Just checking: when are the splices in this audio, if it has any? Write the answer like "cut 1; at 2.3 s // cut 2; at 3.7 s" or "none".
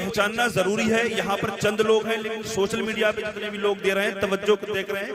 none